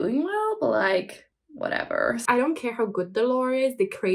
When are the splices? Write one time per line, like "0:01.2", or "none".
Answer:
0:02.2